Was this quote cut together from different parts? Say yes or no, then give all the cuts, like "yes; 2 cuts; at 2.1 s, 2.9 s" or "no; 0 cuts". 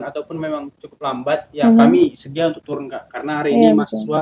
no; 0 cuts